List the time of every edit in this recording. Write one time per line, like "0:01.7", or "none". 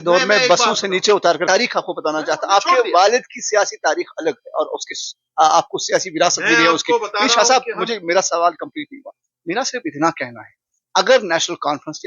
0:01.4